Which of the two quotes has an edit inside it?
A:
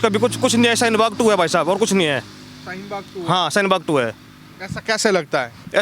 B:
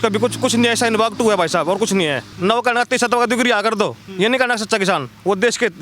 B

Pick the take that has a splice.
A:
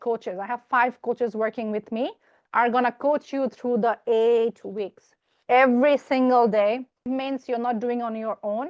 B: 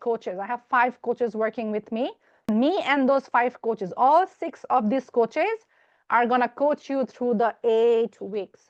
A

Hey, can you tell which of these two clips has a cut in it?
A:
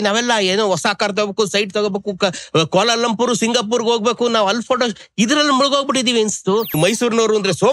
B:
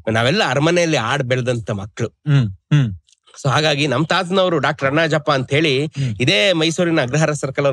A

